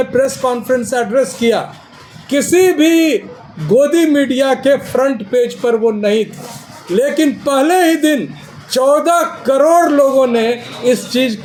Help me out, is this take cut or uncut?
uncut